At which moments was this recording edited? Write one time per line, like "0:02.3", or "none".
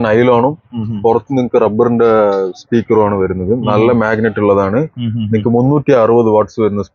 none